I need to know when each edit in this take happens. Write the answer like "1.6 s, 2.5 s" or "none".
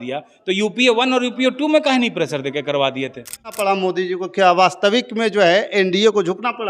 3.5 s

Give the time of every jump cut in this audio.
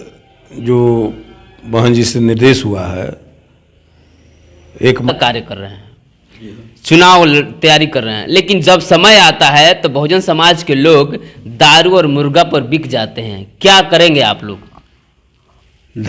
5.1 s

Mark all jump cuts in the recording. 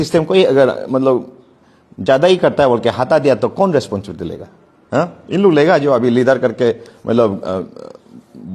none

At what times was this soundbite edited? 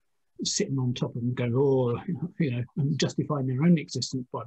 none

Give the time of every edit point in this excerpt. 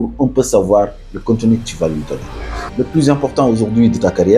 2.6 s

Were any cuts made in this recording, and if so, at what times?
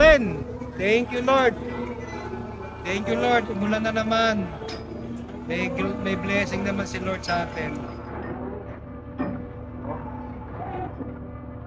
none

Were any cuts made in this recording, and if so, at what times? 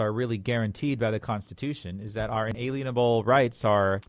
2.5 s

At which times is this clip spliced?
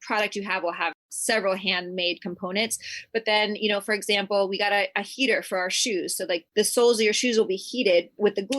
1.1 s, 6.4 s

